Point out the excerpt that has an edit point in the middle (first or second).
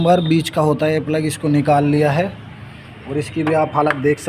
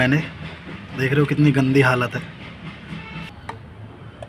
second